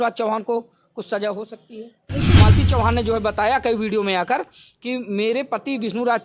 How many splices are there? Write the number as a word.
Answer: one